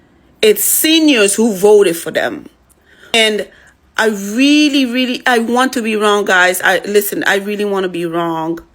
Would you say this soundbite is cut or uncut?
cut